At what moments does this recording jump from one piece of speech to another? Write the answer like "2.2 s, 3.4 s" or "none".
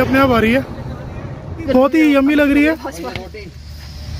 1.7 s